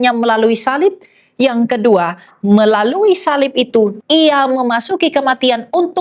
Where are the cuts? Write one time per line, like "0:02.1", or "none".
0:04.0